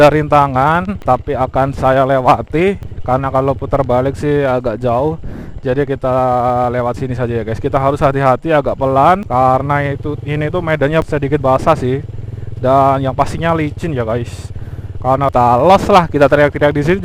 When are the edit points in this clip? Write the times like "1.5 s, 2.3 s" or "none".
0.9 s, 2.9 s, 9.2 s, 11.0 s, 15.3 s